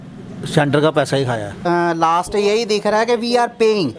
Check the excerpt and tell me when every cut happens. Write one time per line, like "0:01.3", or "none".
0:01.5